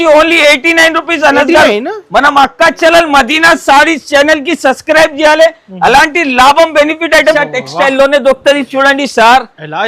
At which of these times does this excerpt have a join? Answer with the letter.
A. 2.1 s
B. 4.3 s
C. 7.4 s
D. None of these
C